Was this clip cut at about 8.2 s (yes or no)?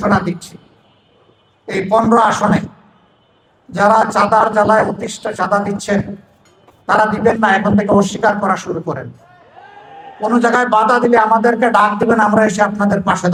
no